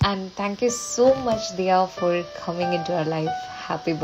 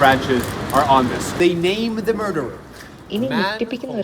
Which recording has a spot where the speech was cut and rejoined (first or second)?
second